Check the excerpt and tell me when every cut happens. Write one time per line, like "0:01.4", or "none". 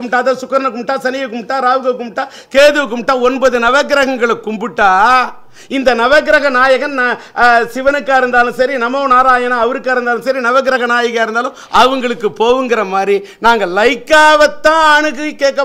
none